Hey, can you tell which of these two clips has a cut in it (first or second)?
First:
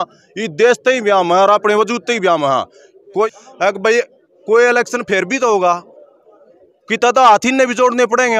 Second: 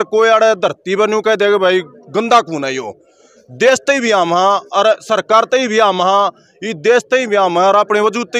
first